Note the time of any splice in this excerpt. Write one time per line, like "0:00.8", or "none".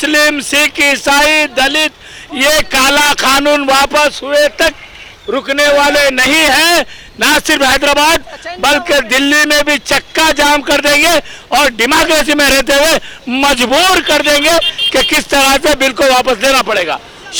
none